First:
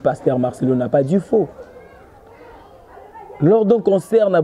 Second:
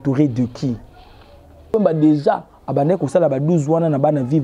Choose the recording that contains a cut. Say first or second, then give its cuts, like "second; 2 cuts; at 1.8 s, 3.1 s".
second; 1 cut; at 1.7 s